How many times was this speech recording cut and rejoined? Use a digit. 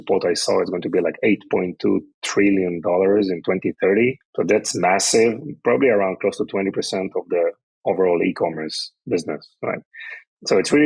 1